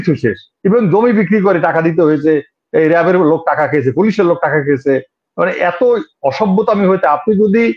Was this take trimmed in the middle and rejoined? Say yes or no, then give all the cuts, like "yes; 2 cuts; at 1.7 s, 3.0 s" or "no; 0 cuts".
no; 0 cuts